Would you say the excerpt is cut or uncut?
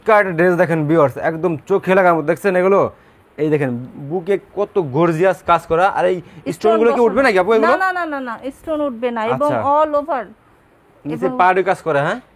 uncut